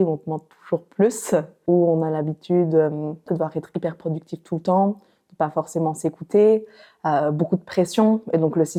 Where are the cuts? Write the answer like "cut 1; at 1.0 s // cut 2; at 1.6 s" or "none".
none